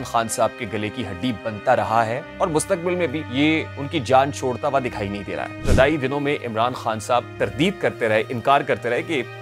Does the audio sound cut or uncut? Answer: cut